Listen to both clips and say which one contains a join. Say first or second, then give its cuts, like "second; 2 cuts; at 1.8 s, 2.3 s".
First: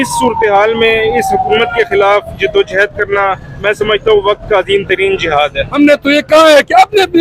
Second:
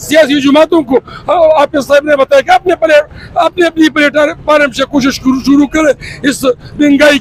first; 1 cut; at 5.6 s